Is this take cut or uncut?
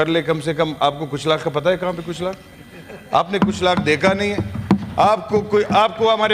uncut